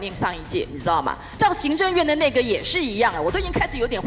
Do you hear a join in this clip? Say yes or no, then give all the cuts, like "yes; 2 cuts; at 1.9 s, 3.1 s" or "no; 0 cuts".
yes; 1 cut; at 1.4 s